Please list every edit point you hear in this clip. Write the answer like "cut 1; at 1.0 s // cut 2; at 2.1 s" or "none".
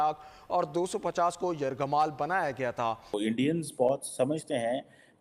cut 1; at 3.1 s